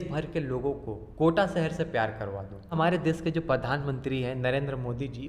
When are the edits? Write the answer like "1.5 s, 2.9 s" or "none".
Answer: 2.7 s